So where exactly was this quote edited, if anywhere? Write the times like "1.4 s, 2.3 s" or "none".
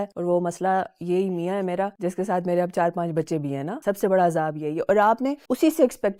none